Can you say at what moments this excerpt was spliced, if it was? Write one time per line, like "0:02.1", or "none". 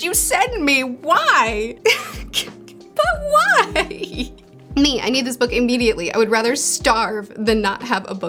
none

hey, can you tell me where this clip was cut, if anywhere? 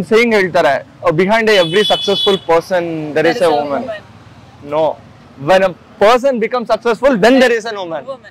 none

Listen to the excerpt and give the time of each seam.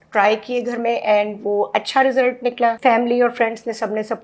0:02.8

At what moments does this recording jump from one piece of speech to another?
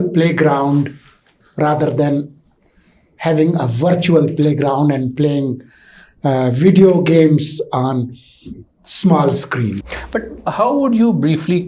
0:09.7

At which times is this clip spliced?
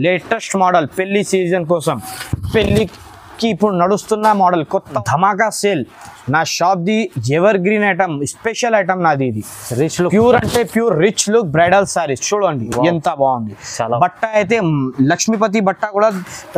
0:05.0

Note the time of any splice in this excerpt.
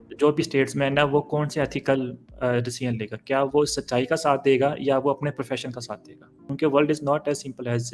0:06.4

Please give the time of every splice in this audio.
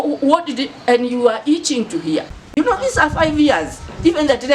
0:02.4

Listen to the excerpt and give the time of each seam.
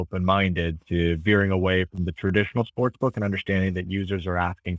none

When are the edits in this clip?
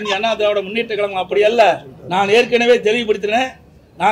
none

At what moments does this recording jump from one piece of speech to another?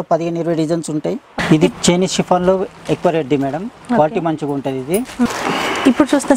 0:01.3
0:05.3

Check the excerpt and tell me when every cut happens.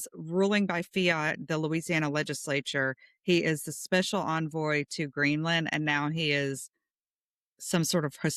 none

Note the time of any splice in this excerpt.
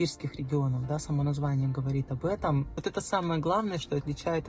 0:02.7

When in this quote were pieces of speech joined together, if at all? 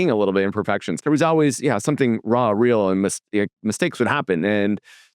0:00.9

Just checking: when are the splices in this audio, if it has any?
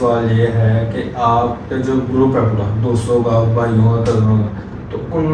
none

